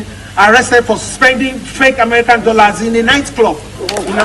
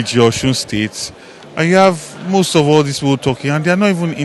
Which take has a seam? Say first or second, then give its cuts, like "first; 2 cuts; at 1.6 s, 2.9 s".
first; 1 cut; at 1.1 s